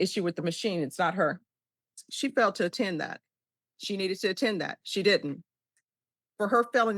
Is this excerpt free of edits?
no; 2 cuts; at 2.1 s, 5.8 s

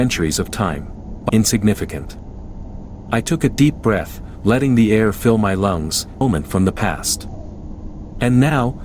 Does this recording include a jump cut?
yes; 2 cuts; at 1.2 s, 6.2 s

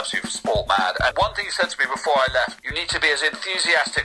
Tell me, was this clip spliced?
yes; 2 cuts; at 1.1 s, 2.6 s

